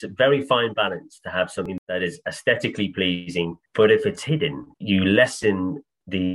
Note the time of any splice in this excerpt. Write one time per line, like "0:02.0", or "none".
0:01.7
0:03.6
0:04.7